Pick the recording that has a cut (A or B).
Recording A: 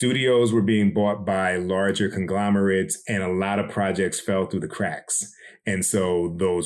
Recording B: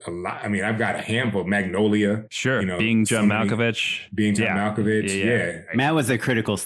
B